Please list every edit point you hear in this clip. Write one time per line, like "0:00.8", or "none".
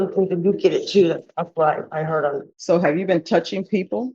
0:02.5